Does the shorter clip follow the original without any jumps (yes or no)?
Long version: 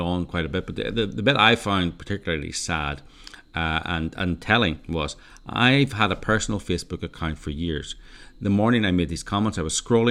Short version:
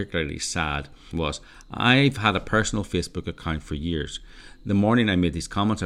no